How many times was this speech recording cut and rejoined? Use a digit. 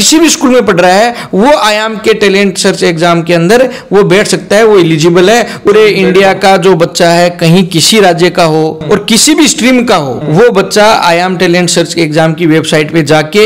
3